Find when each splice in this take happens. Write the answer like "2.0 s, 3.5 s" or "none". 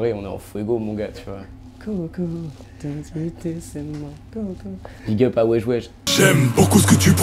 4.9 s, 6.0 s